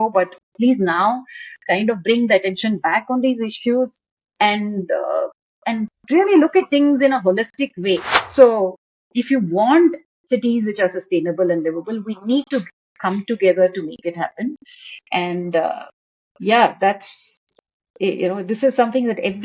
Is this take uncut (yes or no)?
no